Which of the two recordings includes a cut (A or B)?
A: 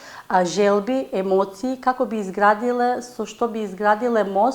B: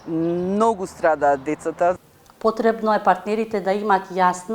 B